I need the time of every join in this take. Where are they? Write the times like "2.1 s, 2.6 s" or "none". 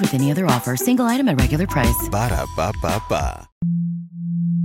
3.6 s